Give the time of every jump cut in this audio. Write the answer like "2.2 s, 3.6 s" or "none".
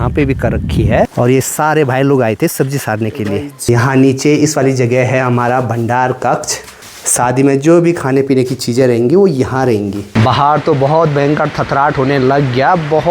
1.1 s, 3.5 s, 10.0 s